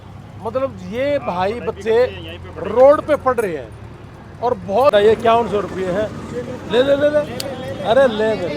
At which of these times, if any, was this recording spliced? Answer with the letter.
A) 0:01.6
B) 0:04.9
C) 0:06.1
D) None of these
B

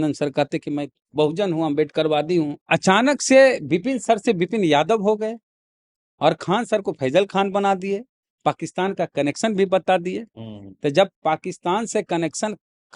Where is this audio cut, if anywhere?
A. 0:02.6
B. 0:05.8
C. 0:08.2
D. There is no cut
A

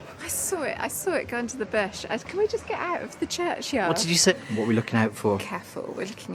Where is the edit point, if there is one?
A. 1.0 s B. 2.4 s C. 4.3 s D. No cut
C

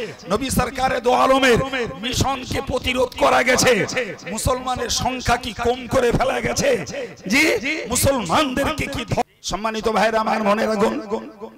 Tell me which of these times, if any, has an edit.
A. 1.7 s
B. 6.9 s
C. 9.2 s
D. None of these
C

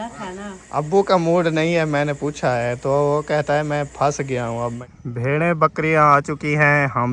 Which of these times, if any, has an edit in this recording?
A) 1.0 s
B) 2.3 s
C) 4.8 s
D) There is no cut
C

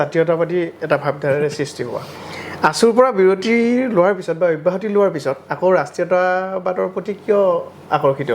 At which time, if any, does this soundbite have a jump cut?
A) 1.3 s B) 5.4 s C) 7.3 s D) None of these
D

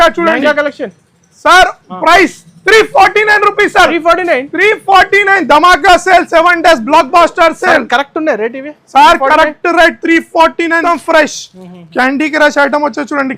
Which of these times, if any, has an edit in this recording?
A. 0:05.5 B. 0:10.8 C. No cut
B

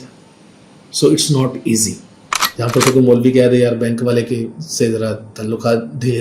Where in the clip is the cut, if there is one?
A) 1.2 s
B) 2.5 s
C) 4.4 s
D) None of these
B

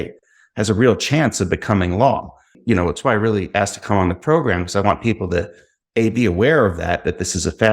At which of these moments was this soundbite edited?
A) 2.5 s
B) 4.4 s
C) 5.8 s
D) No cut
A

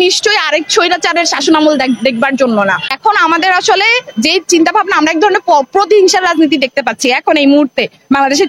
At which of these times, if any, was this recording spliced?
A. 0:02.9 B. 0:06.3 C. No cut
A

